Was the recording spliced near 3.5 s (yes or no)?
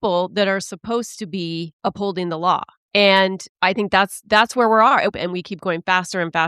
yes